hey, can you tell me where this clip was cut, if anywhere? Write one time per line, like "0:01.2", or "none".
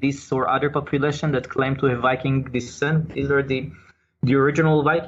none